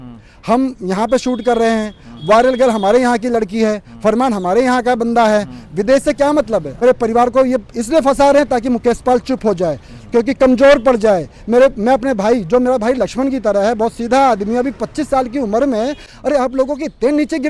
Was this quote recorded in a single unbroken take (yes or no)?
no